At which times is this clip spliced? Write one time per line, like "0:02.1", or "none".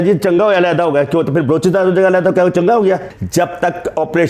0:03.2